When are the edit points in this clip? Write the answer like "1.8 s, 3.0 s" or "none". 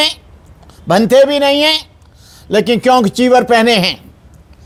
none